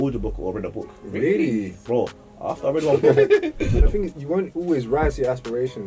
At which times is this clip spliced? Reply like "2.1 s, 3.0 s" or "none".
3.8 s